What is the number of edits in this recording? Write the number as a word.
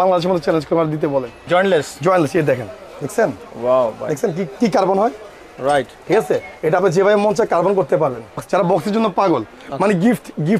two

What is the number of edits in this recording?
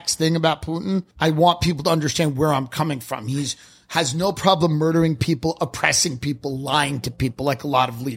one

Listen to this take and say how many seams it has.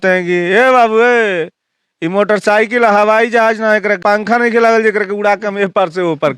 one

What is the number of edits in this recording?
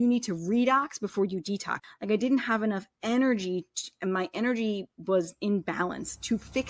one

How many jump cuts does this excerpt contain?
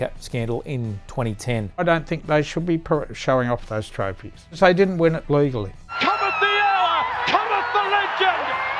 three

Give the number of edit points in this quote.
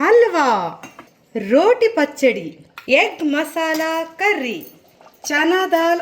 two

